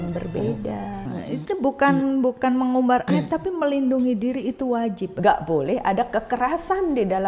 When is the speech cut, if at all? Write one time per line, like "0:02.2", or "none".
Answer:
0:01.1
0:05.1